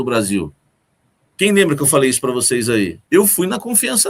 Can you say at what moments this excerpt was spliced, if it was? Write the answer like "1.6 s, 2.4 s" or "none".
3.0 s